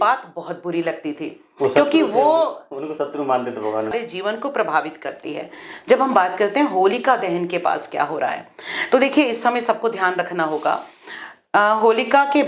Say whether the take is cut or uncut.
cut